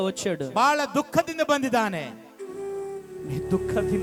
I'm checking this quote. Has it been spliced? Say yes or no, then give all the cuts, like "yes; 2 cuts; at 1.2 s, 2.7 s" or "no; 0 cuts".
no; 0 cuts